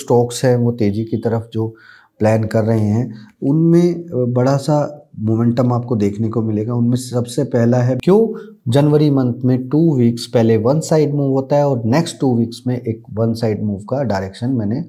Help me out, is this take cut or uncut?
cut